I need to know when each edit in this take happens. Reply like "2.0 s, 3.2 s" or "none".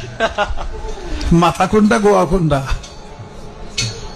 none